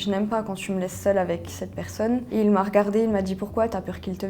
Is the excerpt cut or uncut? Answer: cut